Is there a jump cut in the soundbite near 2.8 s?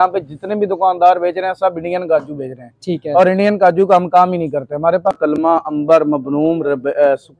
no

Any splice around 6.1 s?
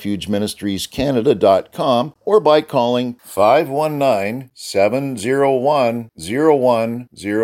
no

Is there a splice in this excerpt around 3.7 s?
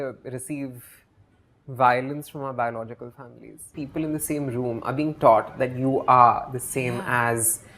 yes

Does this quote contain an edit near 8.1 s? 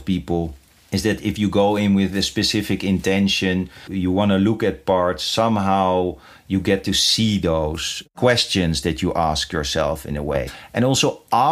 yes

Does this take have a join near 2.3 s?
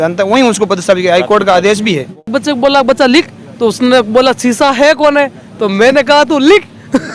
yes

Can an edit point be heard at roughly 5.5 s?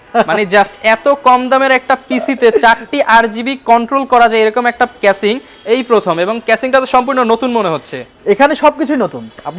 no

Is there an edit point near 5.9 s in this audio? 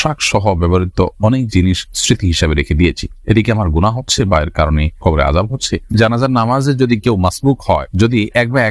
yes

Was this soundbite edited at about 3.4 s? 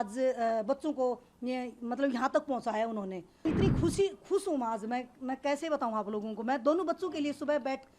yes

